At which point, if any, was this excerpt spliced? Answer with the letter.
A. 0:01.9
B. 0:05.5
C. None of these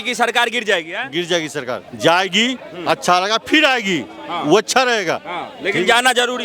A